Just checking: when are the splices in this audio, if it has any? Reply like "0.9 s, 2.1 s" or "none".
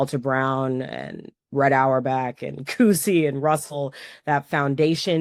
none